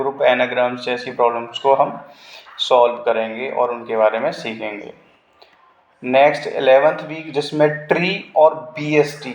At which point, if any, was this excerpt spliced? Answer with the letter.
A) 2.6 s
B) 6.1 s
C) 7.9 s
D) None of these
D